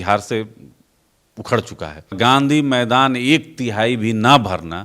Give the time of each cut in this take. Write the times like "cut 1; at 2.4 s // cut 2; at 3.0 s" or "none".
cut 1; at 2.2 s